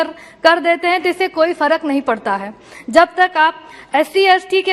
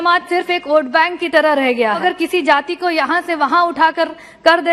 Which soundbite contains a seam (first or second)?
second